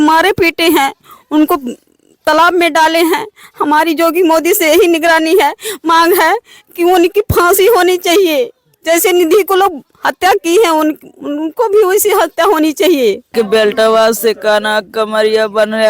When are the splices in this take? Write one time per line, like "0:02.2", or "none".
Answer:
0:13.3